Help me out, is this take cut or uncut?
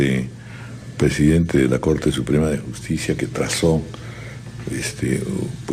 uncut